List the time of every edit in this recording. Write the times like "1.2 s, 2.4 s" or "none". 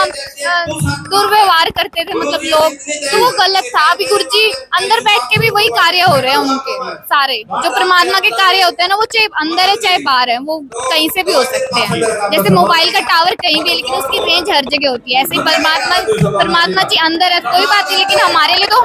none